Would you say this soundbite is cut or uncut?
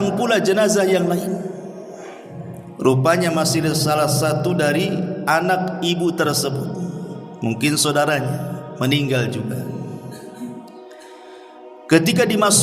uncut